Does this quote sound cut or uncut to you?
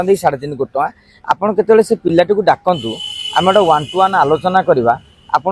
uncut